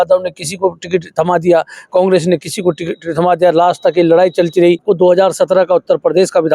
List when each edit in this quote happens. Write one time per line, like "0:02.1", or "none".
0:04.8

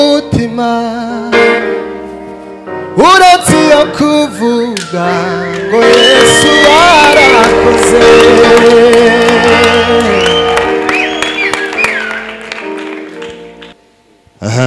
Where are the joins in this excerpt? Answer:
0:13.7

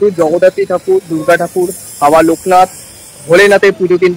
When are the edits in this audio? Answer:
none

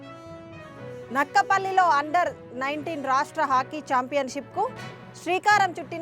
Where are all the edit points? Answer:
0:00.9

